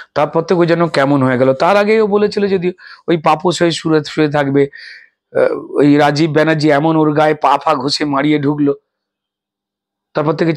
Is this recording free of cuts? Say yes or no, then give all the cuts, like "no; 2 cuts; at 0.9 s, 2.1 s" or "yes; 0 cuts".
yes; 0 cuts